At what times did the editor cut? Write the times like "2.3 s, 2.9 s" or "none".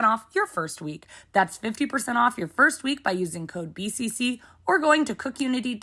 none

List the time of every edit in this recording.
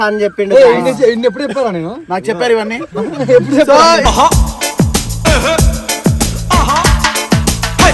none

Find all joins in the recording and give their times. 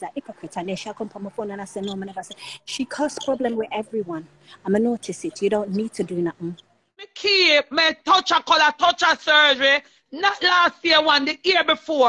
7.1 s

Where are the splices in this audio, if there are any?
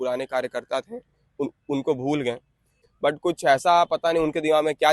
2.4 s

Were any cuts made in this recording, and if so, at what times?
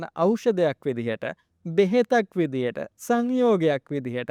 none

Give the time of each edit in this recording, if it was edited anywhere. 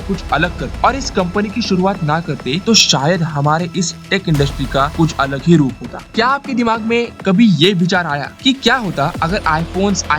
6.1 s

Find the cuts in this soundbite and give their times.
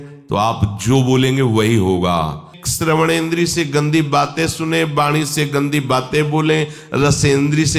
2.6 s

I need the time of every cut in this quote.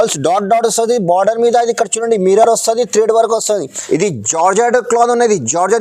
3.7 s

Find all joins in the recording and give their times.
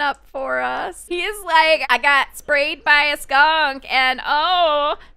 1.0 s

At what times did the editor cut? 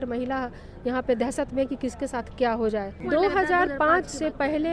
3.0 s

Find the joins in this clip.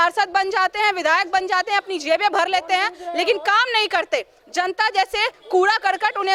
none

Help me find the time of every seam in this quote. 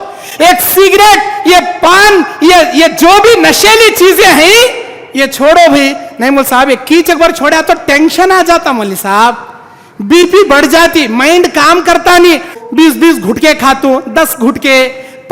12.5 s

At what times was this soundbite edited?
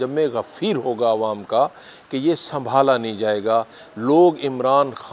none

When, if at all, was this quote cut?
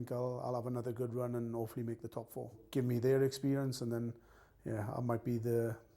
2.6 s

